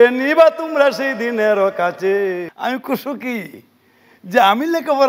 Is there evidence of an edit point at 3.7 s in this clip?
no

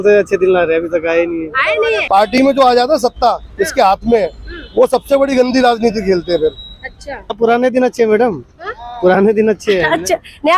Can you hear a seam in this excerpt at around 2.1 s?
yes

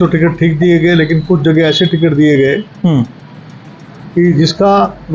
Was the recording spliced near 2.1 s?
no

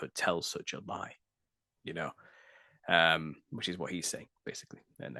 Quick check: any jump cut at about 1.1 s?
no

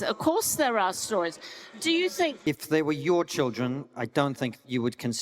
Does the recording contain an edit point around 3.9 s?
no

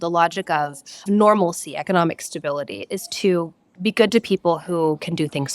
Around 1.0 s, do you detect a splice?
yes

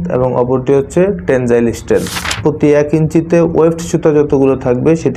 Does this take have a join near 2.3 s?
yes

